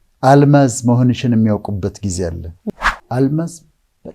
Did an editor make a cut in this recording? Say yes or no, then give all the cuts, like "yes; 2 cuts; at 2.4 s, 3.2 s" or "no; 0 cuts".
yes; 1 cut; at 2.5 s